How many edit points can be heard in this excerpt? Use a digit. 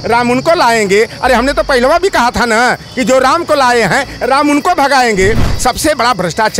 1